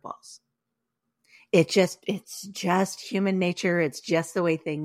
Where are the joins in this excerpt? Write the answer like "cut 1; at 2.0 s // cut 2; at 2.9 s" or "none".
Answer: none